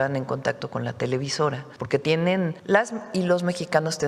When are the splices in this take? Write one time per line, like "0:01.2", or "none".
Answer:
0:01.7
0:02.6